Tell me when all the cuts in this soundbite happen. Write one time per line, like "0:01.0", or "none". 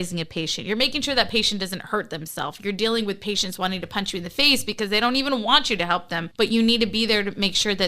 0:06.2